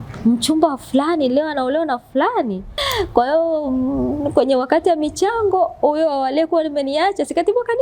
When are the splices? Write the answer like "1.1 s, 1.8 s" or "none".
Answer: 2.9 s